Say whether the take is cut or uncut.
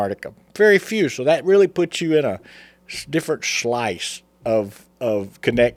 uncut